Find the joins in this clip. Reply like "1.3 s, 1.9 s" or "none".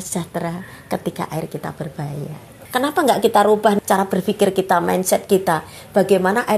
2.6 s, 3.8 s